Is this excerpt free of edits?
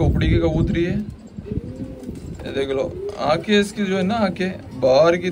yes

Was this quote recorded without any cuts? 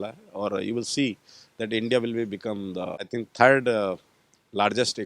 no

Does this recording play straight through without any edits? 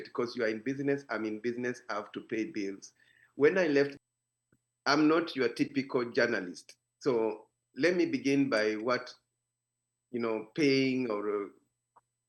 no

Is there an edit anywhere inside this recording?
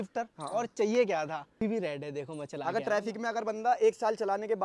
yes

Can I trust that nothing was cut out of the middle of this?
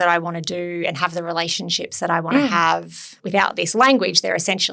no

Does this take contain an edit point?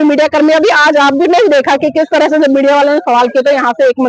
no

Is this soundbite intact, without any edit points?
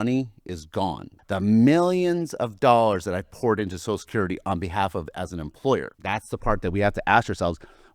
no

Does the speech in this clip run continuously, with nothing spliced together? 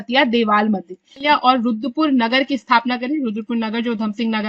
no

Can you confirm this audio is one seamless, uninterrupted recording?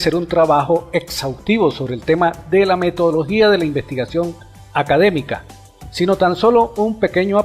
no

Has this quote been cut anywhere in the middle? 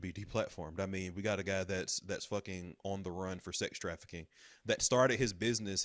no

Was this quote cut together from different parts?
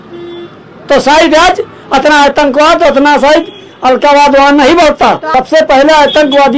yes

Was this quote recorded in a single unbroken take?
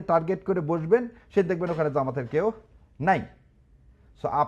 yes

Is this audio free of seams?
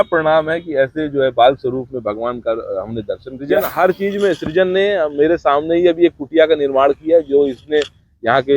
no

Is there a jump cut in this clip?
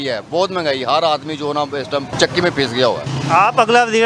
yes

